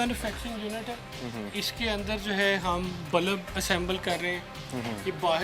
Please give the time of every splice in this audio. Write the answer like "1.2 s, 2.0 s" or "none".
none